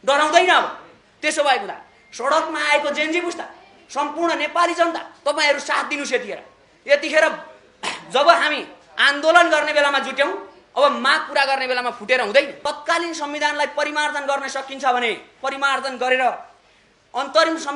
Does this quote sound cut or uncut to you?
cut